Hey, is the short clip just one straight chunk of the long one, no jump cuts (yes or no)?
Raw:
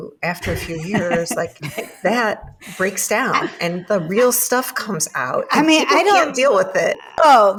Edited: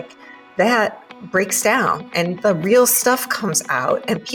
yes